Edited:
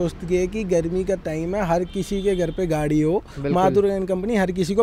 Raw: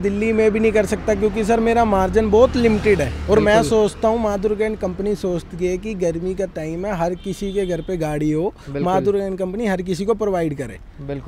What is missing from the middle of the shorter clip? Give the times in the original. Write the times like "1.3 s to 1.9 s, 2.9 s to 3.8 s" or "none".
none